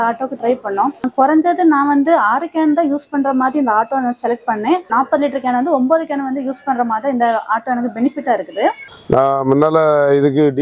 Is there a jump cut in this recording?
yes; 3 cuts; at 1.1 s, 4.9 s, 8.8 s

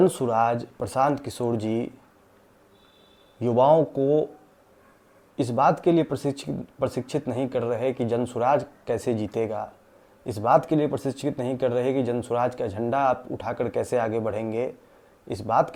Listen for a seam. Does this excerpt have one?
no; 0 cuts

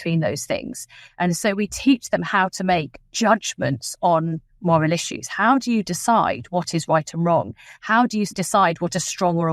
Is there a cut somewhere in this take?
yes; 1 cut; at 8.3 s

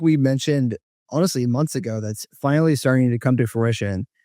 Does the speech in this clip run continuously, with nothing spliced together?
yes; 0 cuts

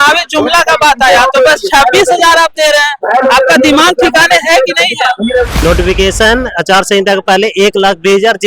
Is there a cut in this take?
yes; 1 cut; at 5.5 s

